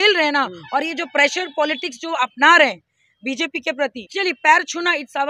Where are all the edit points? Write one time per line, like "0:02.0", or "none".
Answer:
0:04.0